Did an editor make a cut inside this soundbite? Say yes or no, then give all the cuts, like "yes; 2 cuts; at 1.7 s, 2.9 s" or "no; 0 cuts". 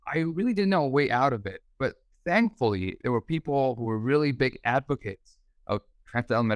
no; 0 cuts